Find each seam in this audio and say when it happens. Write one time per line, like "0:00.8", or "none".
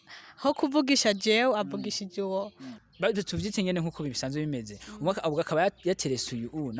0:02.7